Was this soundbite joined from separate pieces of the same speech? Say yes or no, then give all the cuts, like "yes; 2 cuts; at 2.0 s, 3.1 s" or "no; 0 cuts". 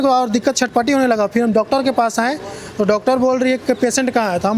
no; 0 cuts